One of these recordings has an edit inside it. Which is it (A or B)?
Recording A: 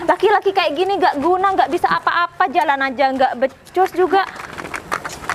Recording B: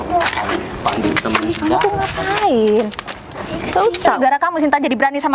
B